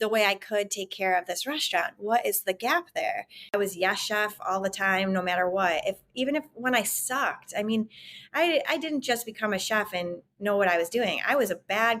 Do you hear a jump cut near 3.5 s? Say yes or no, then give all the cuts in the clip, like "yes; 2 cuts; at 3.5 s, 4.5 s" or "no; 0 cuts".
yes; 1 cut; at 3.5 s